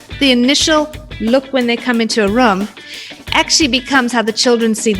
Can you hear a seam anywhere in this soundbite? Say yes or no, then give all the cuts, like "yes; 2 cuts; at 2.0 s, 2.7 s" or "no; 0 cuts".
no; 0 cuts